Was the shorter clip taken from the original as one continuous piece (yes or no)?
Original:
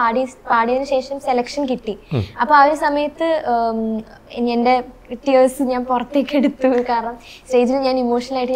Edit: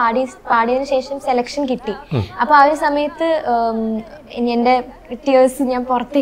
yes